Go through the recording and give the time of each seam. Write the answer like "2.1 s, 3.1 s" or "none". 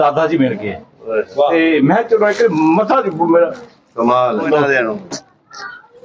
4.5 s